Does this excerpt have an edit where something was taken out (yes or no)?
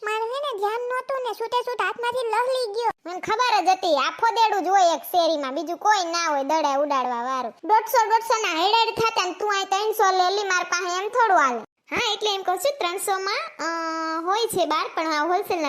yes